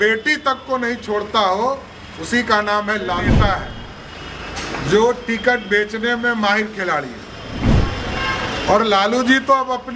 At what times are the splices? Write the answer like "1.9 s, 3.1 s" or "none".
3.3 s